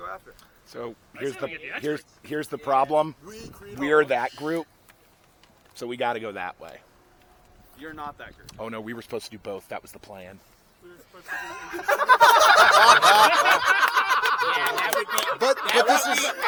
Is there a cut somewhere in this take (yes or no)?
no